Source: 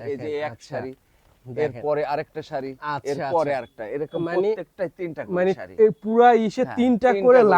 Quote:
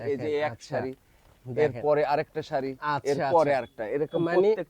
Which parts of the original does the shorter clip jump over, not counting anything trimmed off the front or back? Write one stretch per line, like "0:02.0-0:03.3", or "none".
none